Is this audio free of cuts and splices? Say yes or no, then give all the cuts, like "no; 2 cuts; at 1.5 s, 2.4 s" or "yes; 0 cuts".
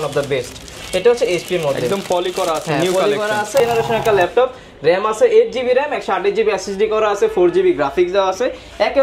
no; 1 cut; at 3.6 s